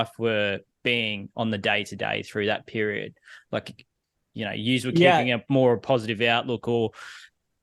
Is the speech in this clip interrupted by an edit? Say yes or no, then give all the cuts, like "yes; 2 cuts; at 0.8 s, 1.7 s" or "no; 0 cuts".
no; 0 cuts